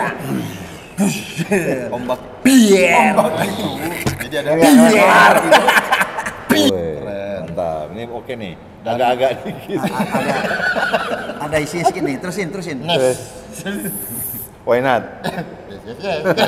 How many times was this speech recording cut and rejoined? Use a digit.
1